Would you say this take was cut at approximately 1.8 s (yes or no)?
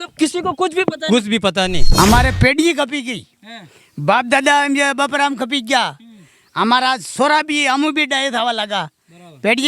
yes